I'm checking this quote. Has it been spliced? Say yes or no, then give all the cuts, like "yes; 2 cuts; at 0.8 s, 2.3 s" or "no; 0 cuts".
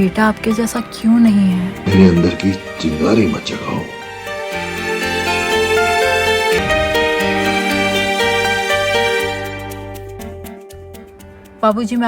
yes; 2 cuts; at 1.8 s, 6.6 s